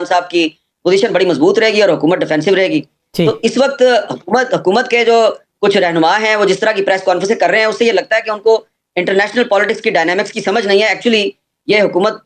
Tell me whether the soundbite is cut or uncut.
uncut